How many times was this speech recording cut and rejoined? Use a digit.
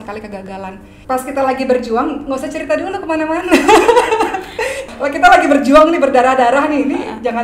2